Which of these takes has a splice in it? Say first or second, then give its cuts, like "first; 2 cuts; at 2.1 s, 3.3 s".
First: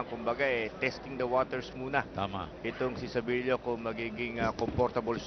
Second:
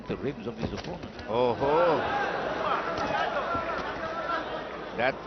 first; 1 cut; at 2.5 s